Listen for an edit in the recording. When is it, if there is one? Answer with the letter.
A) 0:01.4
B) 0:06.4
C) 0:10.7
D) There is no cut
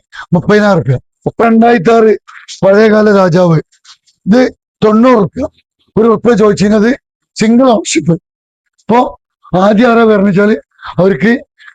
A